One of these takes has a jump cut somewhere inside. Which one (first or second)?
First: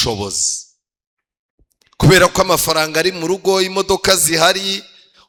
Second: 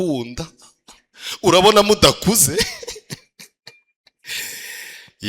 second